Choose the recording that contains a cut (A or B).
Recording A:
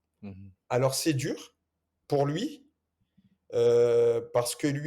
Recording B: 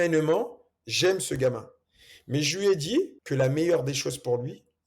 B